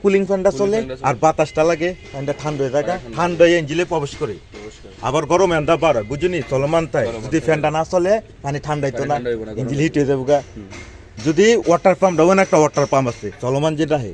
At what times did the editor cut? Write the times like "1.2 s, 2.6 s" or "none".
none